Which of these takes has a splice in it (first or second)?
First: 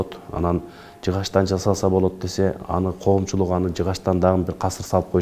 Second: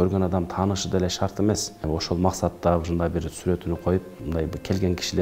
second